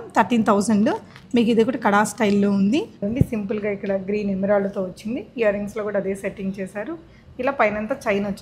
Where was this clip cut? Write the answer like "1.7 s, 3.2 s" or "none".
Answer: 3.0 s

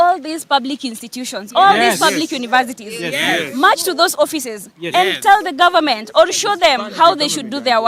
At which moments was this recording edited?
none

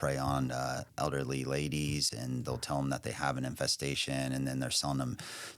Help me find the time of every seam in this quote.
2.1 s

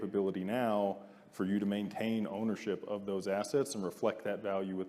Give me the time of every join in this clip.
none

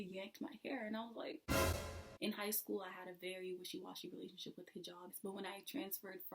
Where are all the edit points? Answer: 2.0 s, 5.1 s

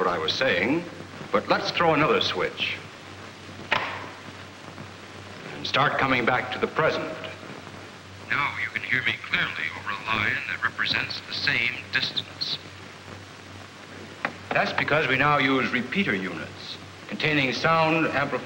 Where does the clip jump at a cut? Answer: none

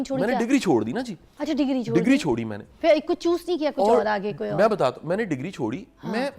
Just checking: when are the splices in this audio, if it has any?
none

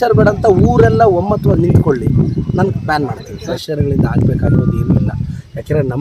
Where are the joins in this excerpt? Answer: 3.3 s

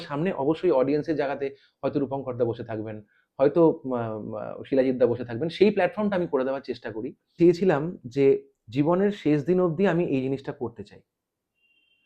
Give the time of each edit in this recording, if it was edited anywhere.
7.4 s

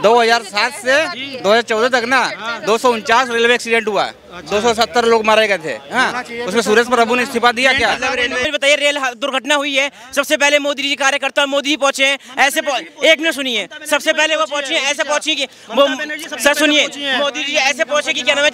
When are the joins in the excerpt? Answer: 8.4 s

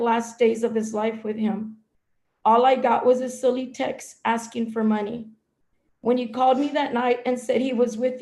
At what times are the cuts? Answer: none

